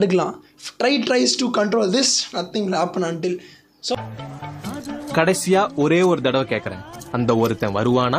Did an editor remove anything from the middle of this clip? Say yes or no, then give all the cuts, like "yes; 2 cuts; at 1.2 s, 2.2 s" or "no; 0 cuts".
no; 0 cuts